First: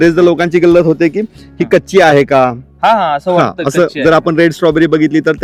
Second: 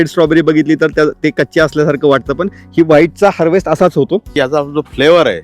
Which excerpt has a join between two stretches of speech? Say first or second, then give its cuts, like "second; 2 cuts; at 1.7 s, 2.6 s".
second; 1 cut; at 4.3 s